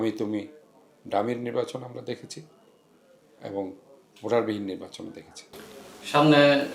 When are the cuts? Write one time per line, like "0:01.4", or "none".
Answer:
none